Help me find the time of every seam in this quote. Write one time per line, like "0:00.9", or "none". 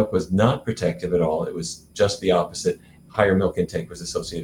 0:03.1

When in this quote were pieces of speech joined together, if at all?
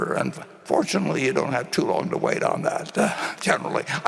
none

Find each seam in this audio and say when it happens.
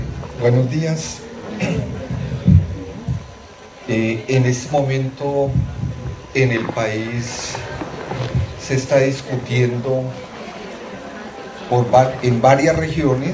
none

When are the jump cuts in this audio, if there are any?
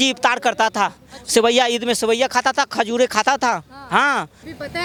none

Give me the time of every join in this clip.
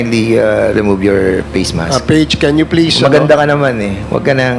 none

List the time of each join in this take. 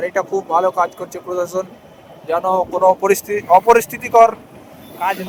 none

